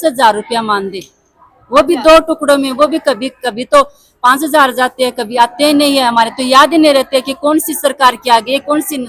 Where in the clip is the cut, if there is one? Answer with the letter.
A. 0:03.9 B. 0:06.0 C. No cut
C